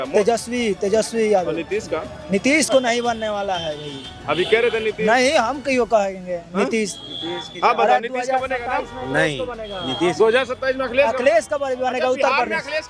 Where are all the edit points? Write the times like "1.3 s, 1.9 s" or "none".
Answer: none

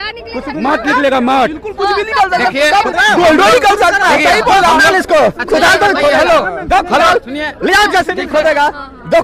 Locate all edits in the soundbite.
none

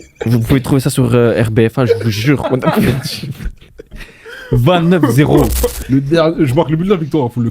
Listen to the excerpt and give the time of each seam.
5.7 s

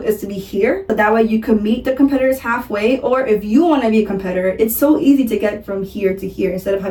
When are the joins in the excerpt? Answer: none

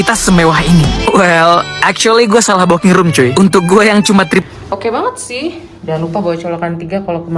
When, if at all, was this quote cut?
4.4 s

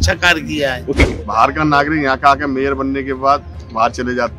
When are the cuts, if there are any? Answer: 1.0 s

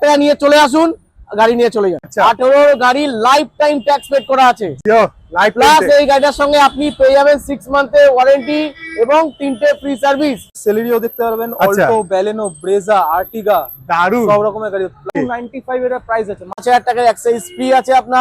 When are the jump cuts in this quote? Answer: 2.0 s, 10.5 s, 15.2 s, 16.6 s

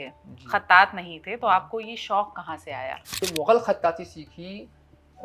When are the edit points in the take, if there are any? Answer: 3.1 s

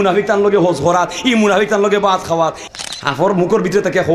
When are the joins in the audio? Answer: 2.6 s

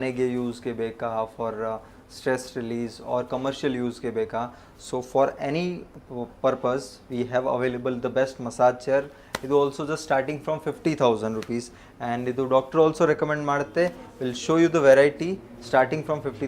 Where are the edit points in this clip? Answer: none

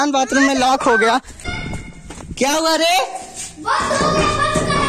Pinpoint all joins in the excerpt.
1.4 s

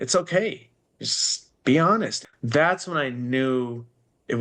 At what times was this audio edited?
2.2 s

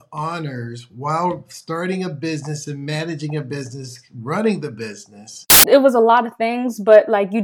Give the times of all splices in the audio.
5.4 s

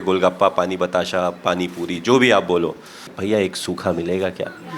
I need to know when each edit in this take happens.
3.1 s

